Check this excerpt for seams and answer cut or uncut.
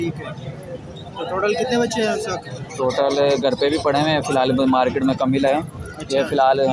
uncut